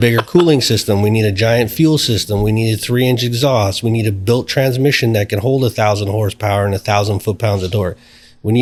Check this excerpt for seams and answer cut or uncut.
uncut